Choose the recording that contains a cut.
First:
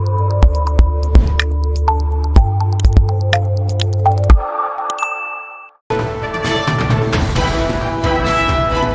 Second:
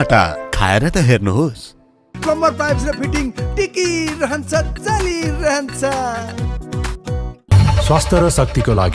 first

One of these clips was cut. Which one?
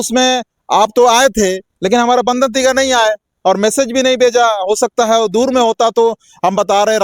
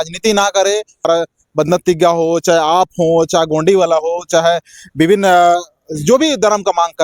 second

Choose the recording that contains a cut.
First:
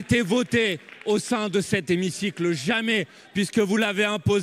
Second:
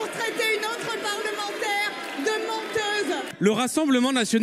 second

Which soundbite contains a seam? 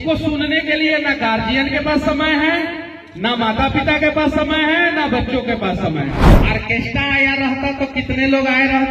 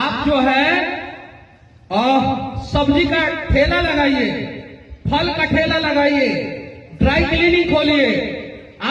first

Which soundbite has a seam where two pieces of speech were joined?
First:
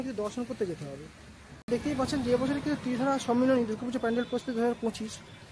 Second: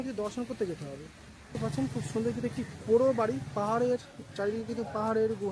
first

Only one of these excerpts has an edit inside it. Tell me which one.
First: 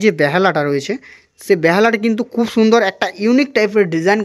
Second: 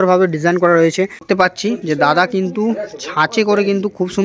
second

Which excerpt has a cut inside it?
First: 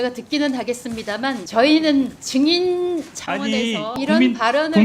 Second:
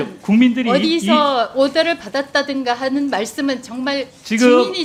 first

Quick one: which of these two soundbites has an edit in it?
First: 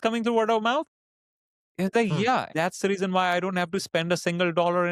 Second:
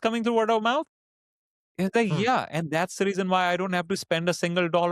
first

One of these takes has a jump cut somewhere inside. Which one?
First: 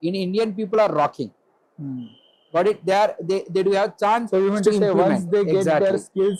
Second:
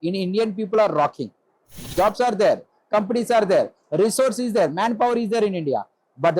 second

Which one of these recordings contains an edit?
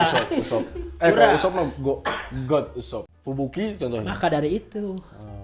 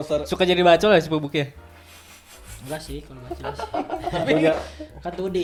first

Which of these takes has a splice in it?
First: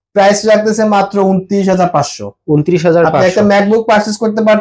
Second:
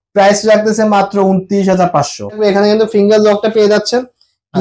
second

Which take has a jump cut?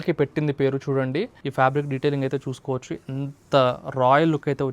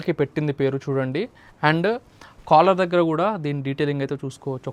first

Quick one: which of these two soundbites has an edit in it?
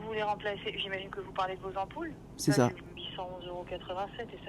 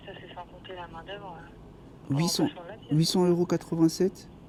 first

